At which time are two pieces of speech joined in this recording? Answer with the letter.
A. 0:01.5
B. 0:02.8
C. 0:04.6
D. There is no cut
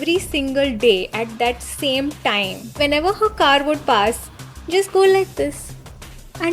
B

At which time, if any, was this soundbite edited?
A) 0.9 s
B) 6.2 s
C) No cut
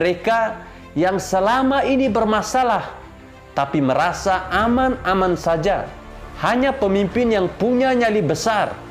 B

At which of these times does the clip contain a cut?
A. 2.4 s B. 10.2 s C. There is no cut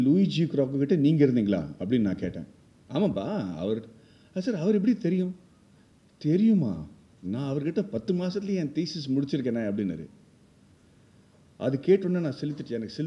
C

